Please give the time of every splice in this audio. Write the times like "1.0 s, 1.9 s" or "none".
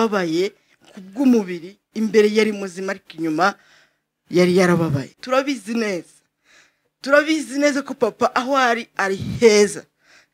5.2 s